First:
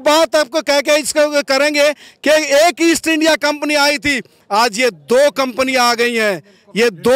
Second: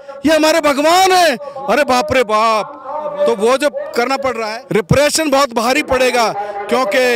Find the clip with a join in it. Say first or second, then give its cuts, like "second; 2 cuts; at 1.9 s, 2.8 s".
second; 1 cut; at 4.5 s